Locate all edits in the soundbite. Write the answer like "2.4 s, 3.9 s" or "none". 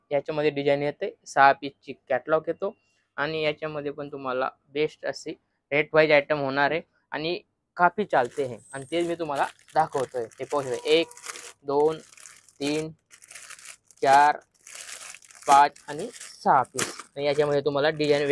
none

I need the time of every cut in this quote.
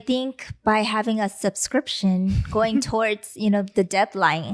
none

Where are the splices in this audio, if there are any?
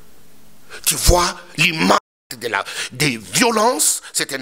2.3 s

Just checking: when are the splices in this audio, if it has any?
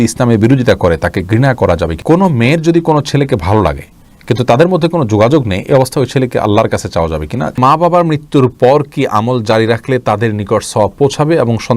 1.9 s, 7.5 s

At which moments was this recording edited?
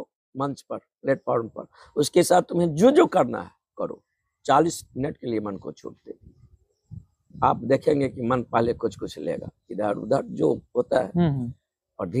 none

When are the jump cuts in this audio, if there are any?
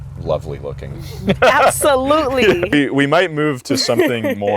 2.7 s

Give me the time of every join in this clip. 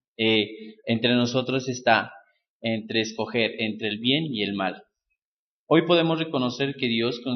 2.3 s

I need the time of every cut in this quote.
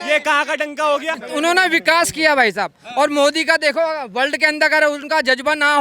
1.2 s

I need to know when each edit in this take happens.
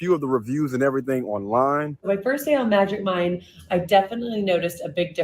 3.1 s

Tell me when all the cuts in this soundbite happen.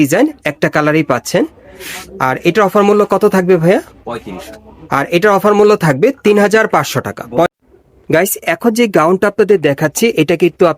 7.5 s

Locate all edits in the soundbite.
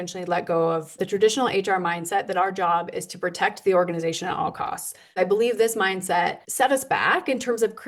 1.0 s, 5.2 s, 6.4 s

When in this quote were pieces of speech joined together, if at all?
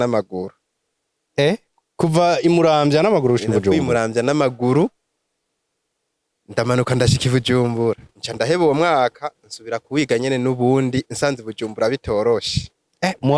8.1 s

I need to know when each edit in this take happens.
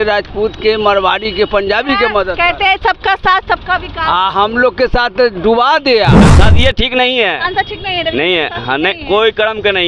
6.2 s

